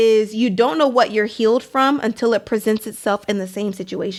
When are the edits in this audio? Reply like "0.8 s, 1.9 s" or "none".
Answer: none